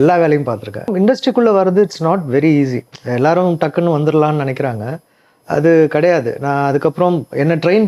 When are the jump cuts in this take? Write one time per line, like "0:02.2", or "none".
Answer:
0:00.9

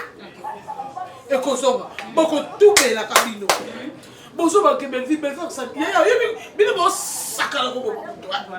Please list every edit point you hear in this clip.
none

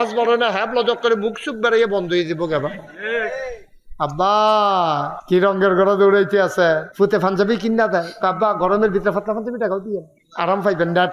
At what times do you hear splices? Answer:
0:05.1
0:06.9
0:10.2

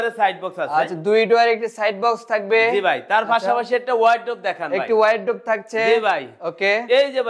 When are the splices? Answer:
none

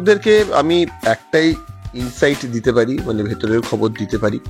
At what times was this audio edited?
none

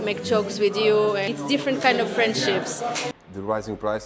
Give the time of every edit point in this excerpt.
0:01.3
0:03.1

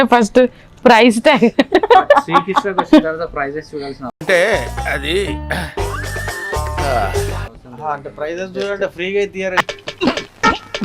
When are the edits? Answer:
0:09.6

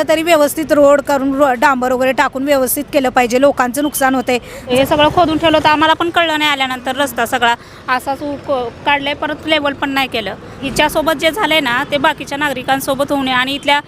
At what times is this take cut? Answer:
0:04.6
0:10.6

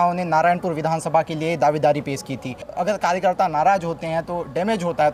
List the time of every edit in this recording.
none

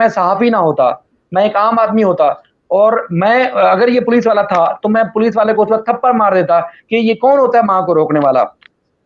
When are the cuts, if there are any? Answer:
none

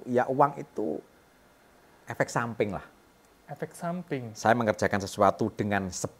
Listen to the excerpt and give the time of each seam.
none

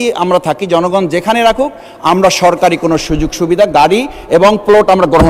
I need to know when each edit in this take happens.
none

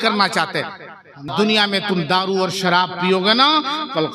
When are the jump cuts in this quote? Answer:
0:01.3

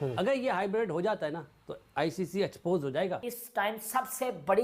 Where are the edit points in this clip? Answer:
0:03.2

